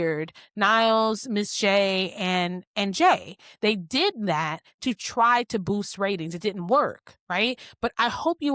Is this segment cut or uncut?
uncut